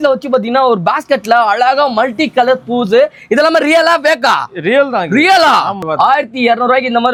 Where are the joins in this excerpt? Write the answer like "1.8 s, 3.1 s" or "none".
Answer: none

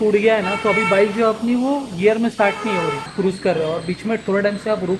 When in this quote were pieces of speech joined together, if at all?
3.1 s

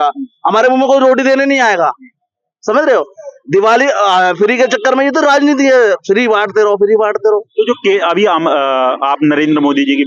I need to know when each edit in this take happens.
none

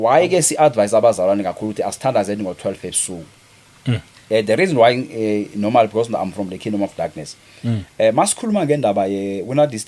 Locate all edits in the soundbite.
none

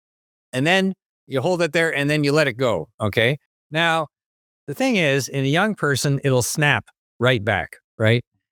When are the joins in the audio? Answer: none

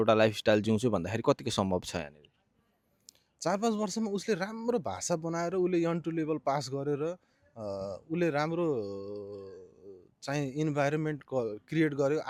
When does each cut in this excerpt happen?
none

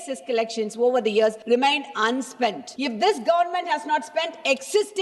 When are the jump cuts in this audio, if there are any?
1.4 s, 2.7 s

